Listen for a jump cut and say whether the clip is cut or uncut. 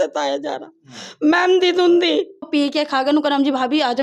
cut